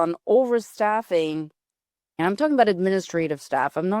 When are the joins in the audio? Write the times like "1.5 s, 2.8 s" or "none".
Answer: 2.2 s